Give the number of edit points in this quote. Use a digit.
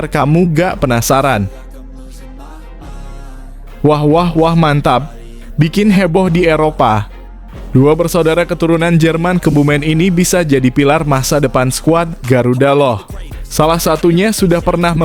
2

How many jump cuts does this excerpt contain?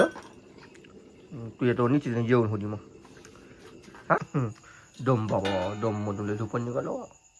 1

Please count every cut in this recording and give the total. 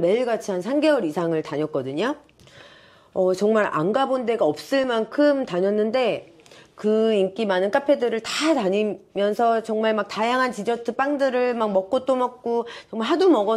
0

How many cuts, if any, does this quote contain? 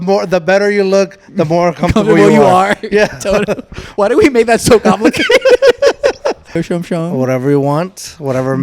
1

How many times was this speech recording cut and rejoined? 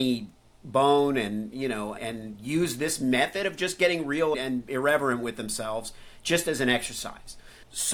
2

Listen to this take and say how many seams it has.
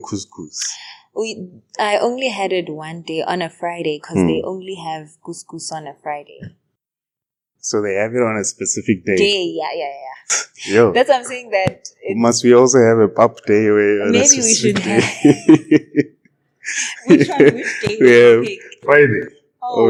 0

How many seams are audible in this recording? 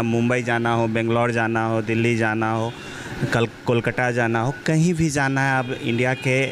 0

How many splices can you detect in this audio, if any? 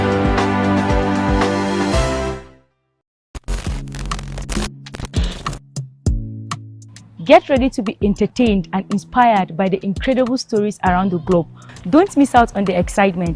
1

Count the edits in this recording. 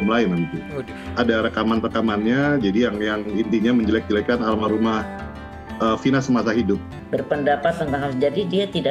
1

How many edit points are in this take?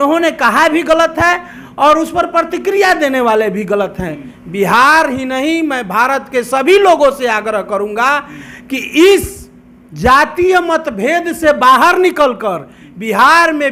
0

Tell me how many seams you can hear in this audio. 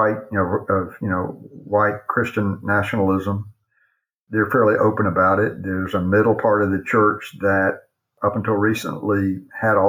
1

